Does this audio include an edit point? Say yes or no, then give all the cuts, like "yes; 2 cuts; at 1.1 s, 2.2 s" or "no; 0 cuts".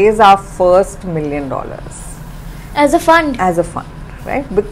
no; 0 cuts